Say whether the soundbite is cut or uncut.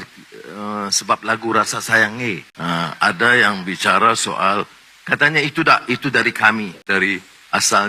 cut